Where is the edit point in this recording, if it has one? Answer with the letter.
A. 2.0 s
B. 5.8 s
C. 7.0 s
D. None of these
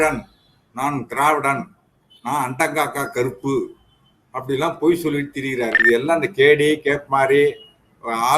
B